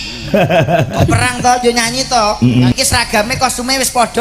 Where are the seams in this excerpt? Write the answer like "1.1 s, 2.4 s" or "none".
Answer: 2.7 s